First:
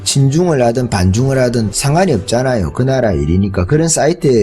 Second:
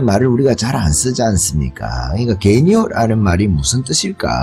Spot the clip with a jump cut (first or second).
first